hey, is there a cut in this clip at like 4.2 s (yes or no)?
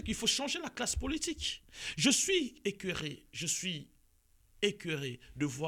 no